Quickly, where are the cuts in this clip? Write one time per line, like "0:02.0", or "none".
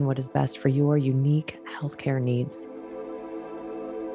0:02.6

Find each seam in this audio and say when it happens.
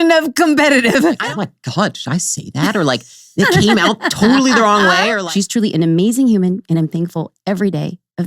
0:01.2
0:05.2

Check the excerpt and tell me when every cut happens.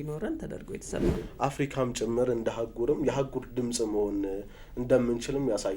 0:01.2

